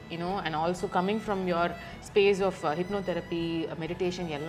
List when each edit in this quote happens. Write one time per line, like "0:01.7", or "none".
none